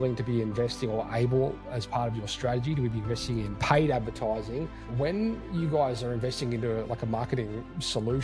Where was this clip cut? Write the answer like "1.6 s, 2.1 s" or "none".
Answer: 1.7 s, 3.6 s, 4.8 s